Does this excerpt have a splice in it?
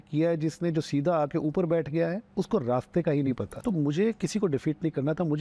yes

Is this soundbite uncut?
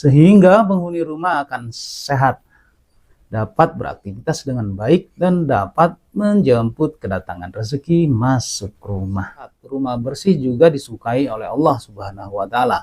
no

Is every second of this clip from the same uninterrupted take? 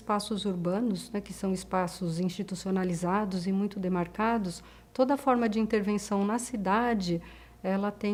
yes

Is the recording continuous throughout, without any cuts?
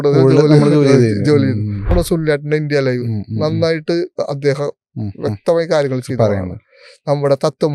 no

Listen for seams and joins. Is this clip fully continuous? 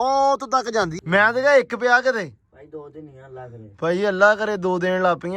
no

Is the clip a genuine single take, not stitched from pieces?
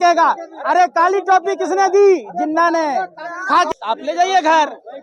no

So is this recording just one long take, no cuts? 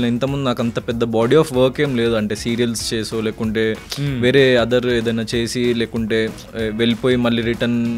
yes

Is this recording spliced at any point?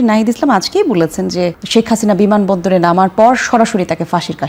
no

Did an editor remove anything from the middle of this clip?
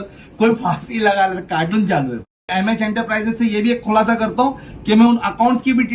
yes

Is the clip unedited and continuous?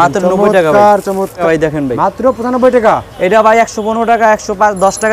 no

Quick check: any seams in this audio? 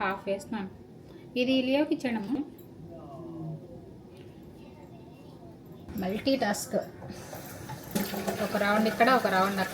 yes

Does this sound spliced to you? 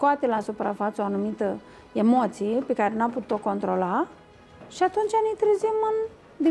no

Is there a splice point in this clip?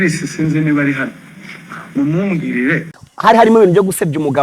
yes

